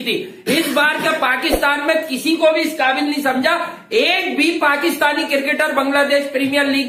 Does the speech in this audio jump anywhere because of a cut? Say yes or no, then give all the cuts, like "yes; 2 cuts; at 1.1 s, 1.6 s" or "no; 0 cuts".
no; 0 cuts